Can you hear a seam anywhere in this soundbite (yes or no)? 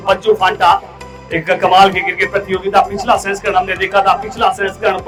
no